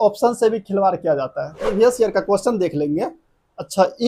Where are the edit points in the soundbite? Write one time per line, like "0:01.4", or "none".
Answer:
0:01.7